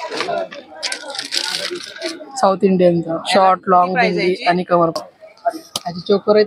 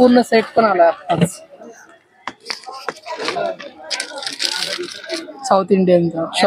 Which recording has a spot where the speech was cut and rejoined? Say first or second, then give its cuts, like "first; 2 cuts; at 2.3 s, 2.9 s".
first; 1 cut; at 5.0 s